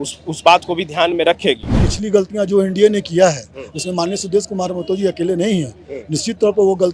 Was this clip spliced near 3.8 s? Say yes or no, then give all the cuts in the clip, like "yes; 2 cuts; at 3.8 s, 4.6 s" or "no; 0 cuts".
no; 1 cut; at 1.8 s